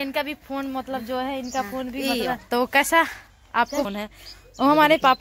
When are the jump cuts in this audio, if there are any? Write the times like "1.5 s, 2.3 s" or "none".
2.4 s, 3.8 s